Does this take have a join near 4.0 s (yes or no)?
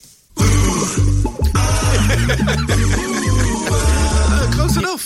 no